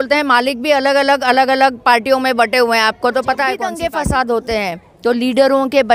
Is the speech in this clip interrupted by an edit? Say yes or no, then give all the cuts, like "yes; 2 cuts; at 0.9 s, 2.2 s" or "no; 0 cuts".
yes; 1 cut; at 3.7 s